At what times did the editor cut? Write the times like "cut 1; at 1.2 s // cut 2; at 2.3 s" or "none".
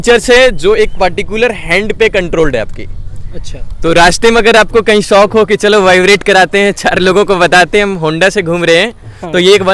none